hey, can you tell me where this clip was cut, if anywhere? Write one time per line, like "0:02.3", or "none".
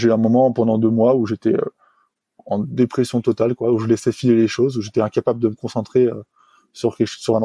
none